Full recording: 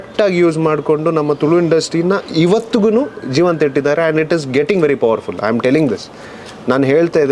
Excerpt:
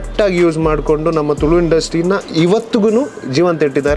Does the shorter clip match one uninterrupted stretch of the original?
yes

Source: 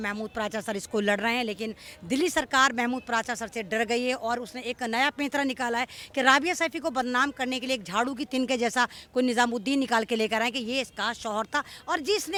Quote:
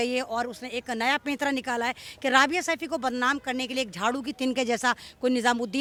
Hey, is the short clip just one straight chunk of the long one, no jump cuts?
yes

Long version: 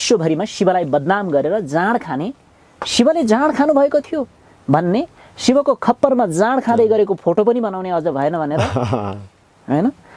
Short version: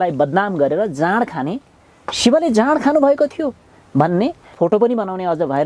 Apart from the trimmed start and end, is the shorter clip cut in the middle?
yes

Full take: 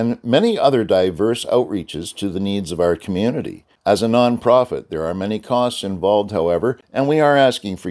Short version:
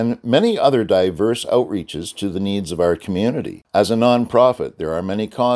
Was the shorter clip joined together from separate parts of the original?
yes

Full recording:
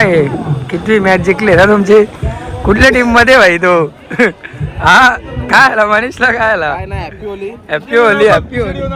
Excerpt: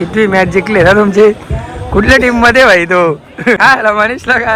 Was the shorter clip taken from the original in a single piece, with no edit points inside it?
no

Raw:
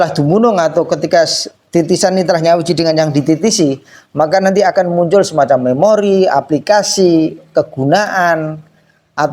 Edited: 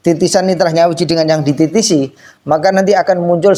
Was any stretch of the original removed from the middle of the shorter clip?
no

